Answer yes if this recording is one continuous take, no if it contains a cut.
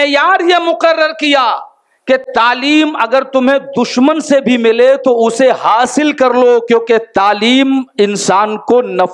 yes